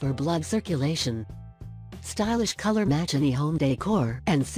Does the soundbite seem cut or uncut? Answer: uncut